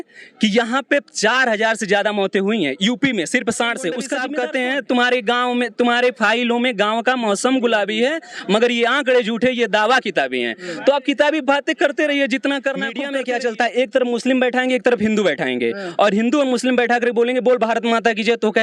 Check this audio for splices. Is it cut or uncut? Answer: cut